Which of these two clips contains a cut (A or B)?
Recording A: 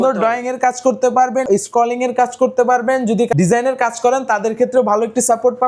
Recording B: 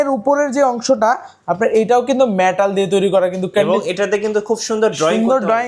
A